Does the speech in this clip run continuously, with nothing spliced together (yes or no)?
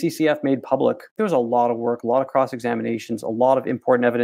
no